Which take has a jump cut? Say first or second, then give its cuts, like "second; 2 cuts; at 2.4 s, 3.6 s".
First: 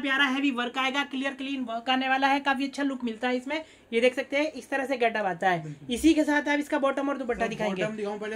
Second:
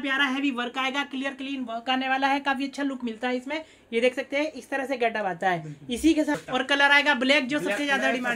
second; 1 cut; at 6.4 s